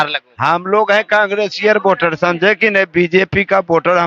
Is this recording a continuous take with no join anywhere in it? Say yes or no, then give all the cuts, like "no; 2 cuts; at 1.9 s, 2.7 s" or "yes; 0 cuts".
yes; 0 cuts